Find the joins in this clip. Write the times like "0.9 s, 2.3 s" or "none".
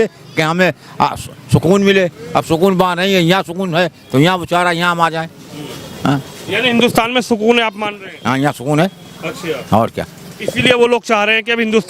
none